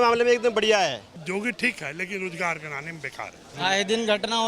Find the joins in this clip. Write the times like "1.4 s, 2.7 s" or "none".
1.1 s, 3.5 s